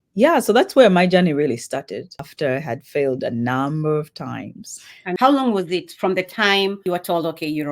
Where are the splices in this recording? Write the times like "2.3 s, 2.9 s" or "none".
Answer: 2.2 s, 5.1 s, 6.8 s